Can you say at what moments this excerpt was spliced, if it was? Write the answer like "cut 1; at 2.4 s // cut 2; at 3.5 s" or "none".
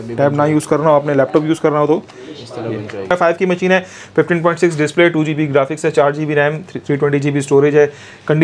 cut 1; at 3.1 s